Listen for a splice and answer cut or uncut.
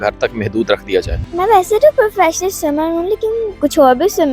cut